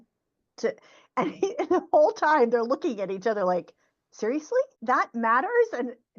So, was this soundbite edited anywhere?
yes; 1 cut; at 4.8 s

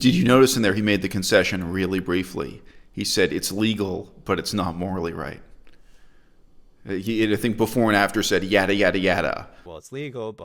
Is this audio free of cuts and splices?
yes; 0 cuts

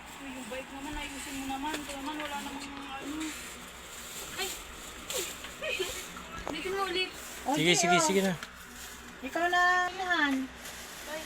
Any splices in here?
yes; 1 cut; at 9.9 s

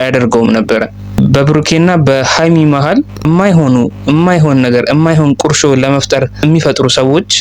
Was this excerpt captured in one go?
no; 2 cuts; at 1.0 s, 3.2 s

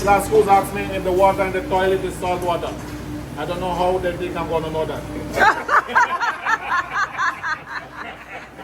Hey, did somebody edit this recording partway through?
no; 0 cuts

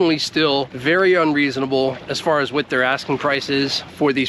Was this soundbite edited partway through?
no; 0 cuts

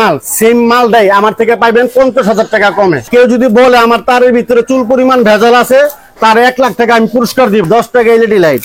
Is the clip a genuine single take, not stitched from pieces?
no; 2 cuts; at 3.1 s, 7.6 s

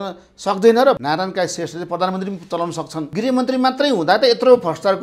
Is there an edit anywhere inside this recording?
yes; 2 cuts; at 1.0 s, 3.0 s

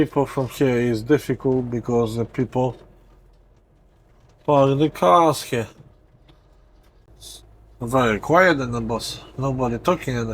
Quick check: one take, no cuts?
no; 1 cut; at 7.1 s

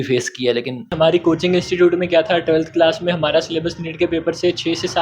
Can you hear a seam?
yes; 1 cut; at 0.9 s

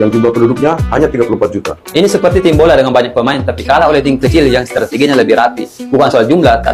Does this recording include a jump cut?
no; 0 cuts

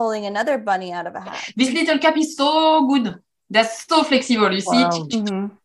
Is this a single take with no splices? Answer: no; 1 cut; at 1.4 s

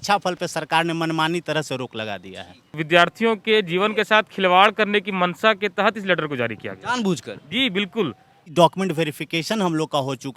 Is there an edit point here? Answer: yes; 2 cuts; at 2.8 s, 8.5 s

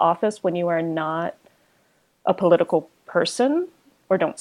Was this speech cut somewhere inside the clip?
no; 0 cuts

